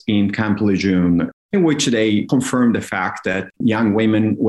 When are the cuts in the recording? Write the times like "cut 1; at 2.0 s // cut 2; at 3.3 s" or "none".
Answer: cut 1; at 1.3 s // cut 2; at 3.6 s